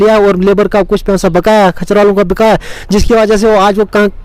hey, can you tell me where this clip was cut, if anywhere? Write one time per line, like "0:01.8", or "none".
none